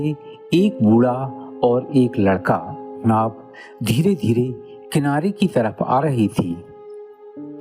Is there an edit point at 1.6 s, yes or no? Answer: no